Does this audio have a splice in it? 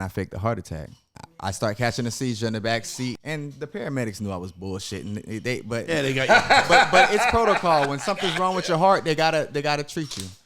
yes; 2 cuts; at 1.2 s, 3.2 s

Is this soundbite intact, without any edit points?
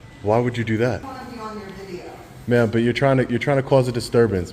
no; 1 cut; at 1.0 s

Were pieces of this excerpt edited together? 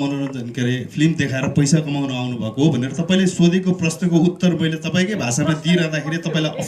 no; 0 cuts

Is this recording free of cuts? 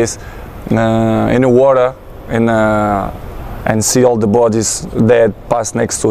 yes; 0 cuts

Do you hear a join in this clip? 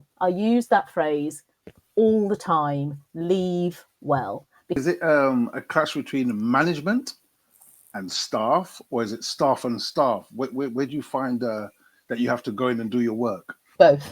yes; 1 cut; at 4.8 s

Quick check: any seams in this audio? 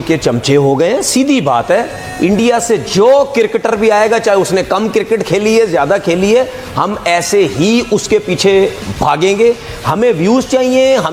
no; 0 cuts

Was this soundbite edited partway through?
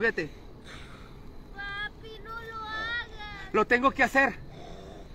no; 0 cuts

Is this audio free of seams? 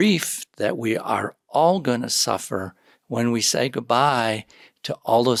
yes; 0 cuts

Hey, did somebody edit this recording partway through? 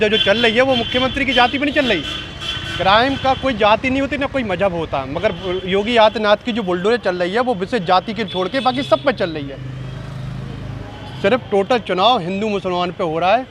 no; 0 cuts

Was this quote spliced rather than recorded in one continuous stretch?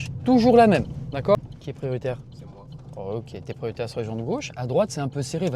yes; 1 cut; at 1.4 s

